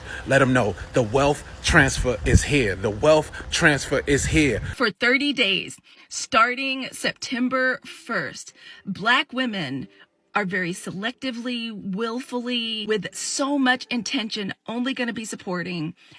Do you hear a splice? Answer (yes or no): yes